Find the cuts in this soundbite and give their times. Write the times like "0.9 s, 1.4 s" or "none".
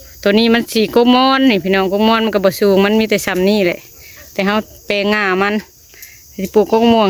none